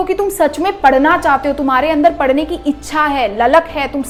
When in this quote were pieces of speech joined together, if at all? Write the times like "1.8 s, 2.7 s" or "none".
none